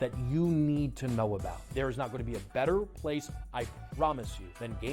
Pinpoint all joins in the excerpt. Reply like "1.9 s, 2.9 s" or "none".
1.7 s